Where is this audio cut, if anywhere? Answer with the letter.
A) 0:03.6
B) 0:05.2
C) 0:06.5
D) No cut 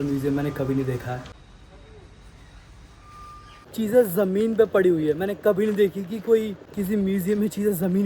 A